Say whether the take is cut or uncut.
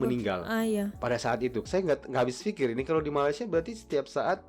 cut